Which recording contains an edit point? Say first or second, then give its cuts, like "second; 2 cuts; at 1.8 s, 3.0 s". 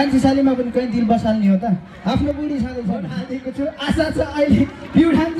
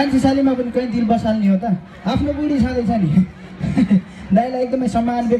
first; 1 cut; at 3.1 s